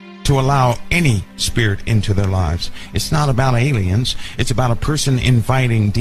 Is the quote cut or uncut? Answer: cut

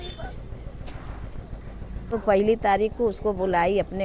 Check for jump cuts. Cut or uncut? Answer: cut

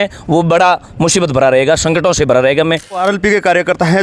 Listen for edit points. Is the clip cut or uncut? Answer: cut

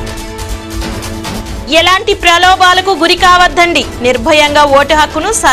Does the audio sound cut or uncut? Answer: cut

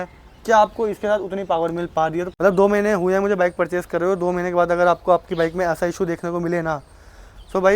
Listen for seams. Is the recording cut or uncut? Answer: cut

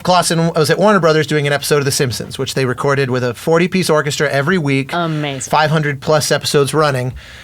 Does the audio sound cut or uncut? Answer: cut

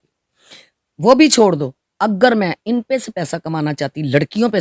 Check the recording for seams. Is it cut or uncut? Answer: uncut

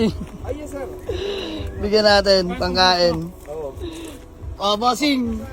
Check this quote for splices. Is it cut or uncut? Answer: uncut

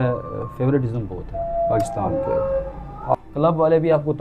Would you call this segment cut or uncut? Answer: cut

